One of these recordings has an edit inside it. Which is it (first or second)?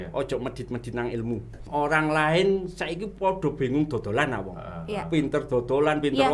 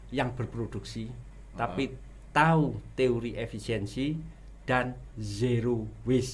first